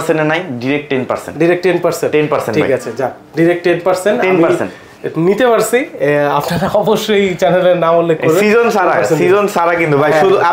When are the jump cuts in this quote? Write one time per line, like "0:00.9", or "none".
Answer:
none